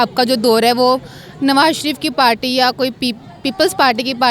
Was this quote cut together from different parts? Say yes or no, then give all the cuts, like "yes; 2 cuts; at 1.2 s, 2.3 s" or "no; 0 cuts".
no; 0 cuts